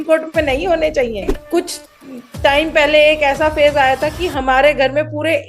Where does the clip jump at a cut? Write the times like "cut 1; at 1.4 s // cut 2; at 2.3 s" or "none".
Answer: cut 1; at 1.4 s